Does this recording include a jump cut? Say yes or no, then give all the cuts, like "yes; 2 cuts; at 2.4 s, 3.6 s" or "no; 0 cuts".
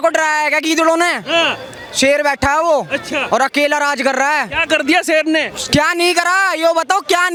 no; 0 cuts